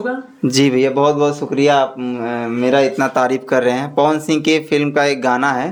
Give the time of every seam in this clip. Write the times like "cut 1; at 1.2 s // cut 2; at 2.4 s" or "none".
none